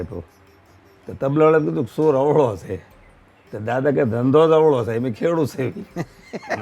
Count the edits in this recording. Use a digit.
0